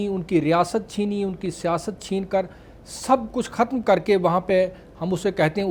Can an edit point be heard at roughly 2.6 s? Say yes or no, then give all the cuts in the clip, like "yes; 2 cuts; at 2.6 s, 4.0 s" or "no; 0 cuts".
no; 0 cuts